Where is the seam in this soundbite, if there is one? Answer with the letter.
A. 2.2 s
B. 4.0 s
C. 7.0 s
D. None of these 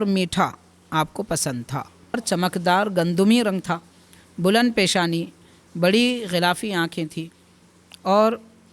A